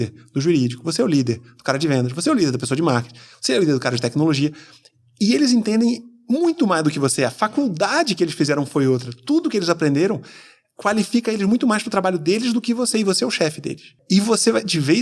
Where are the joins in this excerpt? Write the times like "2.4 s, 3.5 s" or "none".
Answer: 14.0 s